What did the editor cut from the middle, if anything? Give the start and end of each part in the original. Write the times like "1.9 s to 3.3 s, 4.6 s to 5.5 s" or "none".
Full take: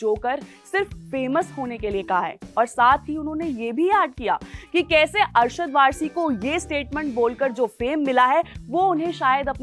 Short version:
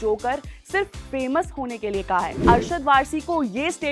2.4 s to 5.3 s